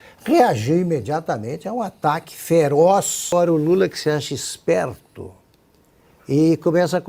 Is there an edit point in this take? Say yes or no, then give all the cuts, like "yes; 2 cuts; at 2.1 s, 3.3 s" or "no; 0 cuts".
yes; 1 cut; at 3.3 s